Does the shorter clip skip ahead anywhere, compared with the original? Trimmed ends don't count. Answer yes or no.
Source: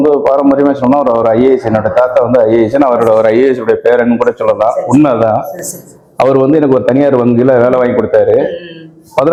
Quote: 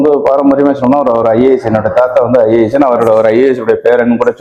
no